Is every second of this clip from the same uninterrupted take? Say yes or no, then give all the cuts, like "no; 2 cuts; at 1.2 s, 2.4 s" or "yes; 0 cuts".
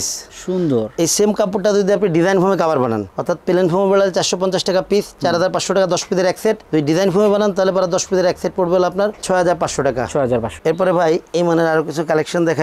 yes; 0 cuts